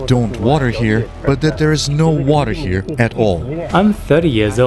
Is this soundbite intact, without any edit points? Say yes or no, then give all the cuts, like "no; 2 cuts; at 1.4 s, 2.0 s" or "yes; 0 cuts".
no; 2 cuts; at 1.1 s, 3.5 s